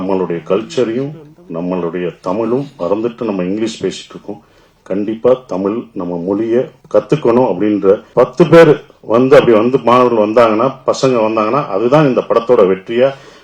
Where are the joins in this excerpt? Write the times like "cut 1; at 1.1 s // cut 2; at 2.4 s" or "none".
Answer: cut 1; at 6.8 s // cut 2; at 8.1 s